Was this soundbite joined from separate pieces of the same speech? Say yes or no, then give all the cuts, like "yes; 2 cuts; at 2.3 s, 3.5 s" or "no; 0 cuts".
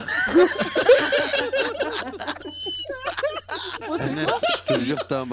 yes; 1 cut; at 3.8 s